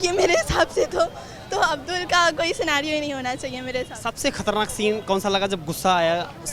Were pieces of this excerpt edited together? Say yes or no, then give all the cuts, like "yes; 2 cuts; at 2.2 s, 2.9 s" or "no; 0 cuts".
no; 0 cuts